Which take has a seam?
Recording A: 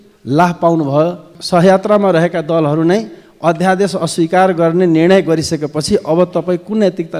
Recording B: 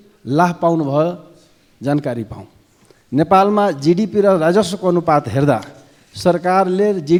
A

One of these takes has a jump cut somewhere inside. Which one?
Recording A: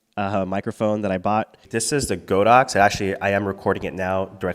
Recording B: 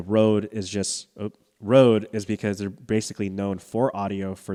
A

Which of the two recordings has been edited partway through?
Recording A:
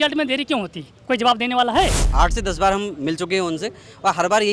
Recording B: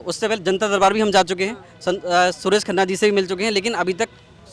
A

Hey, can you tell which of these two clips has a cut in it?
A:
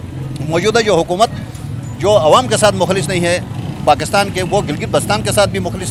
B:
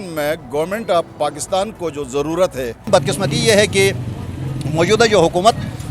B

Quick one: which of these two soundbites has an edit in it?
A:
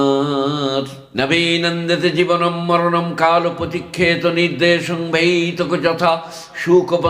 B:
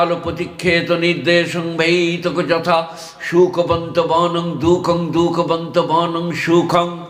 A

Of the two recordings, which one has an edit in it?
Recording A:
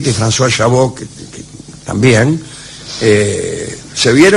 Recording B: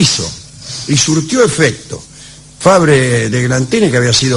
B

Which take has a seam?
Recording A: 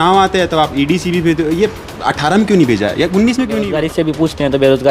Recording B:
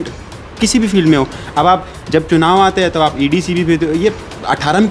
A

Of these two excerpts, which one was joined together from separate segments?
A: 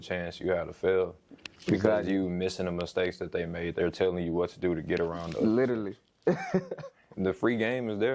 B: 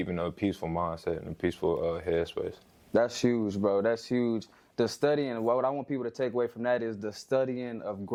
A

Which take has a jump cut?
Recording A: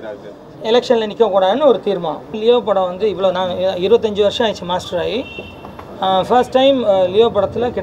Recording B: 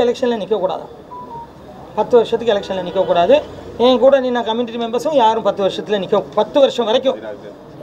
A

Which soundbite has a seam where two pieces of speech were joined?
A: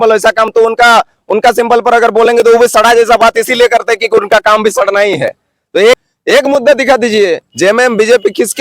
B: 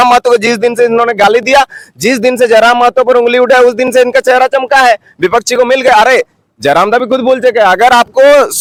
A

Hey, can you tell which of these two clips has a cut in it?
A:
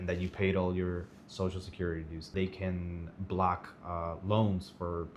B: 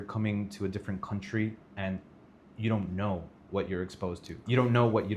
A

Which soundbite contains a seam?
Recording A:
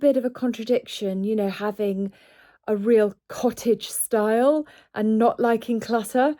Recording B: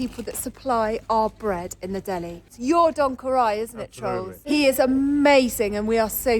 B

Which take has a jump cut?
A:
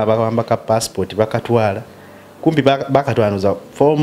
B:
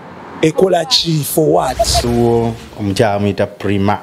B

